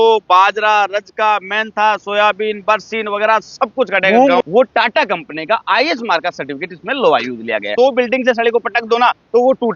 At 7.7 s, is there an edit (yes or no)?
yes